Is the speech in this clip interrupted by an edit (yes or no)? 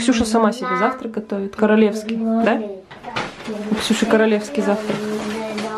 no